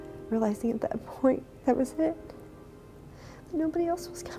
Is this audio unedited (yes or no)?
yes